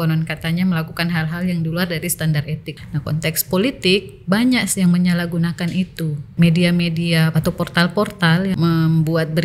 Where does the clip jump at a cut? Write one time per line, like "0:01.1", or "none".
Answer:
0:02.6
0:06.3
0:07.3
0:08.5